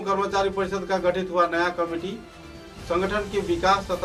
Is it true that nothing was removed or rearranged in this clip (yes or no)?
yes